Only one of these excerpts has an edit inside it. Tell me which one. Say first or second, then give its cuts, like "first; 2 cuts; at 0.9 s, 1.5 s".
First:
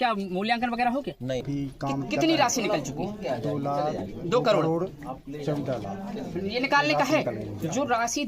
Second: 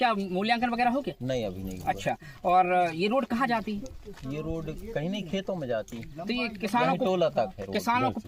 first; 1 cut; at 1.4 s